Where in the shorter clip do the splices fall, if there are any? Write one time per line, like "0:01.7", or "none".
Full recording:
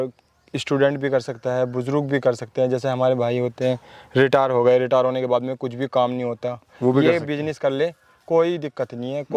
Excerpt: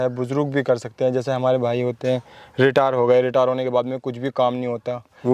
none